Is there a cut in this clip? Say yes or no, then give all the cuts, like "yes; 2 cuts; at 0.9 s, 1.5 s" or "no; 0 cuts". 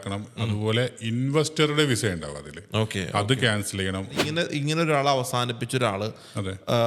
yes; 1 cut; at 4.2 s